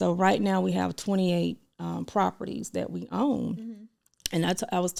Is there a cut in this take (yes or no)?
no